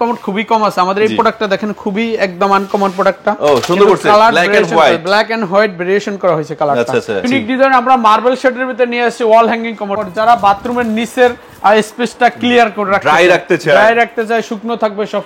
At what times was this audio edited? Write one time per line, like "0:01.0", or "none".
0:07.3
0:09.9